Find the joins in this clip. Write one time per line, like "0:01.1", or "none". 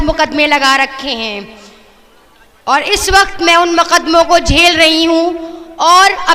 none